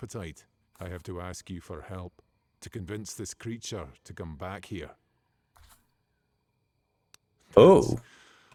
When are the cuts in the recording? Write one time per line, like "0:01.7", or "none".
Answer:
none